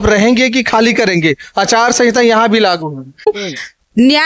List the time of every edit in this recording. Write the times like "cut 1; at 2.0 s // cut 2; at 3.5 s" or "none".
cut 1; at 3.3 s